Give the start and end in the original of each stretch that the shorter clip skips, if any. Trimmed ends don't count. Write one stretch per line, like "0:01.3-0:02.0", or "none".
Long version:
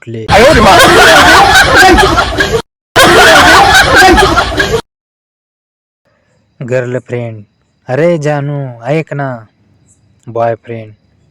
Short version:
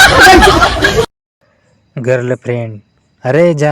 0:02.8-0:05.8